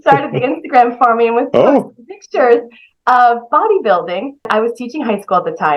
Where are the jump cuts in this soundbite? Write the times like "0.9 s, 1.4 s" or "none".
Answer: 4.5 s

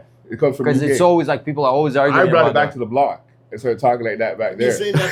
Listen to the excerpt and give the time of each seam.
none

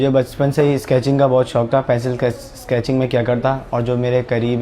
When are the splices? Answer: none

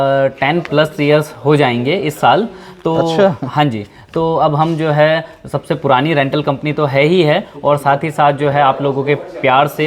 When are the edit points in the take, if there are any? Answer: none

